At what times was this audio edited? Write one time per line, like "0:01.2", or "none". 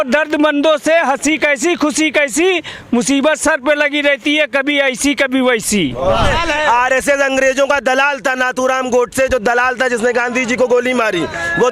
0:06.3